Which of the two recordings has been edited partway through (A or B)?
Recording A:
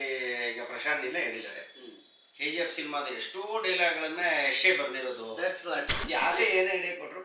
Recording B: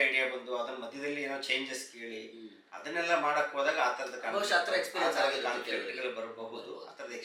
A